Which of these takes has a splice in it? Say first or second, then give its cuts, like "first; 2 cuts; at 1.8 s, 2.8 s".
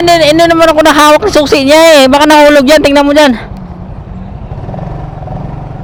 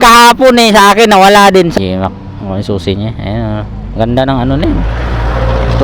second; 1 cut; at 1.7 s